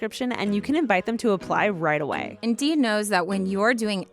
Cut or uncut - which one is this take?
cut